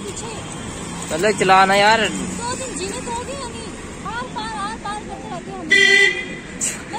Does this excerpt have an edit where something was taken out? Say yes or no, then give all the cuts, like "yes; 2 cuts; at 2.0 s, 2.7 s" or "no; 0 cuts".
yes; 1 cut; at 4.0 s